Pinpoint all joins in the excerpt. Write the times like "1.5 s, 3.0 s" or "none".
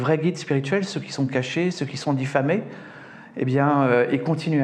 none

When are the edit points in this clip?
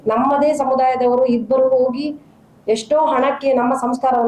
none

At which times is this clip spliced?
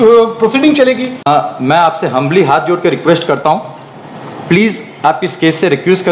1.3 s

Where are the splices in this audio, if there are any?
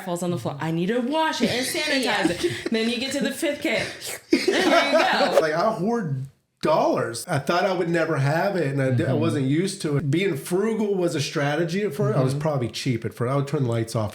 5.4 s, 7.2 s, 10.0 s

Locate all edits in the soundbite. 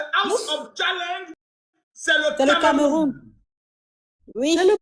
2.1 s

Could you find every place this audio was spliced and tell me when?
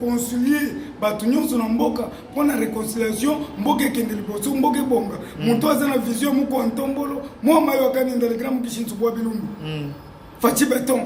none

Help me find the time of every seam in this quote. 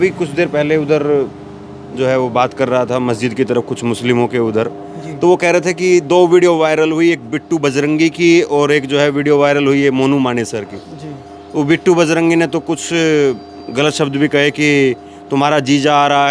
none

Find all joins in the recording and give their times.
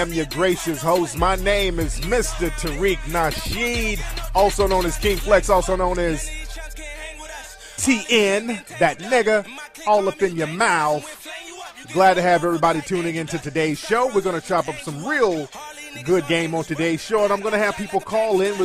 none

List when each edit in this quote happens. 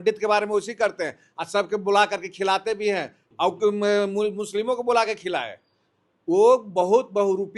3.2 s

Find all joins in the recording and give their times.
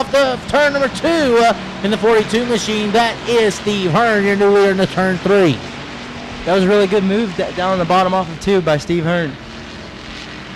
2.6 s

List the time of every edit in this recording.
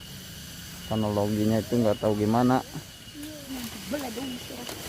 3.4 s

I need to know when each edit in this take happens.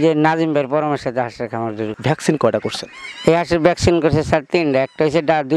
1.9 s

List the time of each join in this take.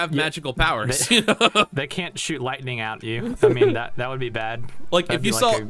none

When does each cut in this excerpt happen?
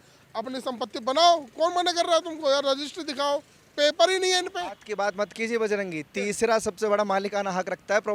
none

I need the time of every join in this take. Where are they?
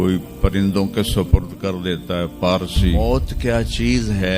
3.0 s

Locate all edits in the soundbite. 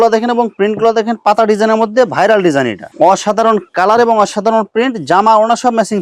2.8 s

